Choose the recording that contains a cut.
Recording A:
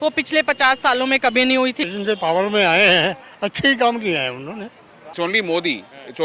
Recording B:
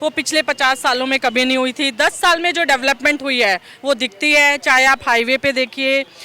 A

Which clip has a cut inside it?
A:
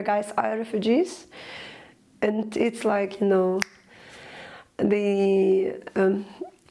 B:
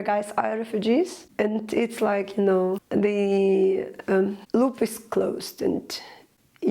B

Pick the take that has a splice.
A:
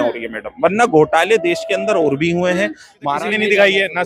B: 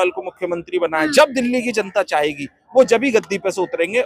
A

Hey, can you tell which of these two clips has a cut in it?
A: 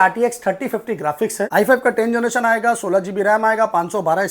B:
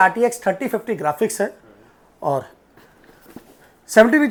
A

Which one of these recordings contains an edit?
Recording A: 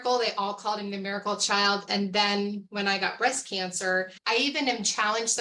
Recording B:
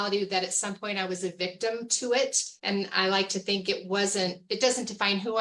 A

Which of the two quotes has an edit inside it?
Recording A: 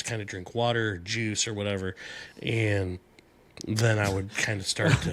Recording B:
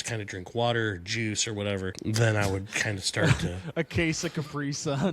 B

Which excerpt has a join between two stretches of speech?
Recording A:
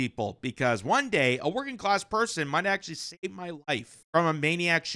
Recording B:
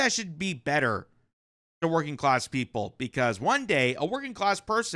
A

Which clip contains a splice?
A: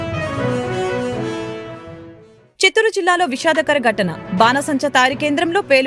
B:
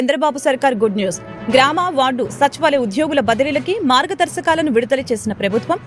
A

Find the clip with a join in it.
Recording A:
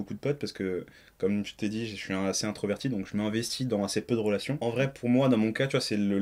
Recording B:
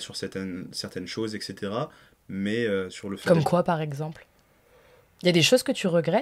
A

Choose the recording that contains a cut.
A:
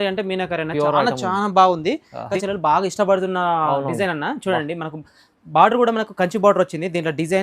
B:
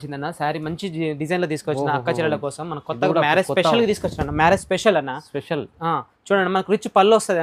A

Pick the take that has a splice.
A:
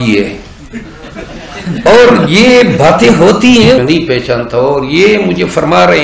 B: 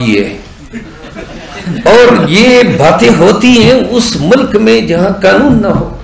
A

